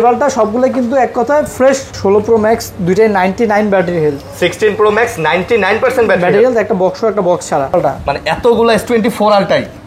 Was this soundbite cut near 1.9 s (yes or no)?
yes